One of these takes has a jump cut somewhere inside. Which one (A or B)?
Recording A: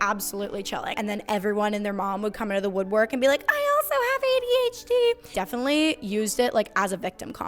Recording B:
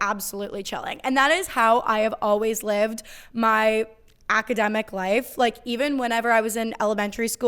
A